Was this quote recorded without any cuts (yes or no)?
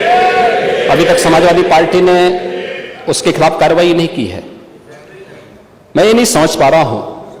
yes